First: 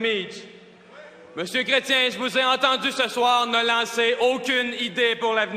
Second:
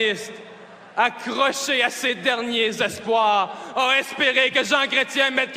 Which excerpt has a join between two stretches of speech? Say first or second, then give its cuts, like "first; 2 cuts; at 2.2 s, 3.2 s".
second; 1 cut; at 2.9 s